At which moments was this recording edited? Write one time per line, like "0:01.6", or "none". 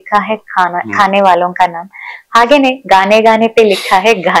none